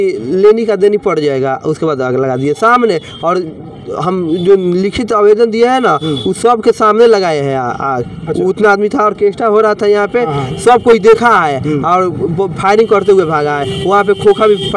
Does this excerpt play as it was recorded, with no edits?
yes; 0 cuts

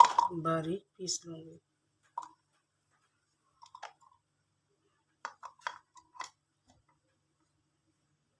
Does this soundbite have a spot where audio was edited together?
no; 0 cuts

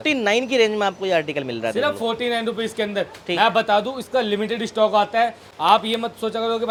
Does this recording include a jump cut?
no; 0 cuts

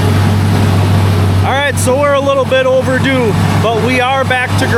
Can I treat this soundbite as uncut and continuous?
yes; 0 cuts

